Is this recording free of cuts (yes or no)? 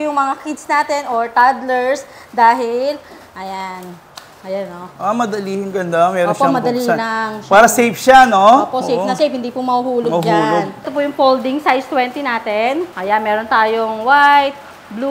no